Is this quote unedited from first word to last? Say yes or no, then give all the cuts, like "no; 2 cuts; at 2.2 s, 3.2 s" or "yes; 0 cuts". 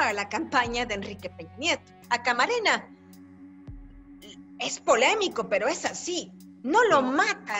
no; 1 cut; at 1.9 s